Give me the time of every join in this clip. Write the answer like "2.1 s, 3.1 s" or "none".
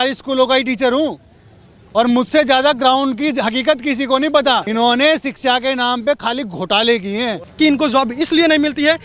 4.7 s, 7.4 s